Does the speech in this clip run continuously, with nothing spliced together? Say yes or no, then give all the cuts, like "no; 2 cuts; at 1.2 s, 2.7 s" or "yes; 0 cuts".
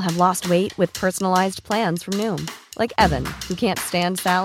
yes; 0 cuts